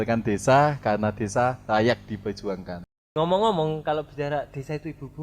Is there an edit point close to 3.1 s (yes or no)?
yes